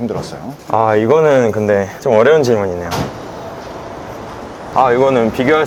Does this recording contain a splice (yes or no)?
no